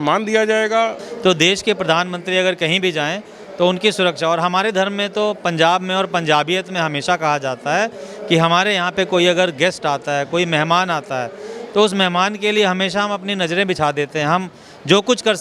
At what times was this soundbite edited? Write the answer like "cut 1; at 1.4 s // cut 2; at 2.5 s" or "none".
cut 1; at 1.1 s

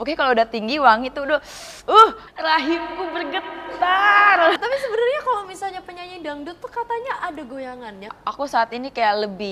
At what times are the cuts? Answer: cut 1; at 2.2 s // cut 2; at 4.6 s // cut 3; at 8.2 s

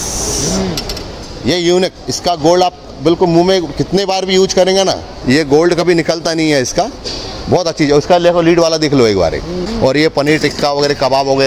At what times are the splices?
cut 1; at 5.1 s // cut 2; at 9.5 s

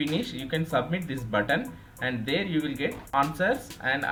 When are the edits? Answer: none

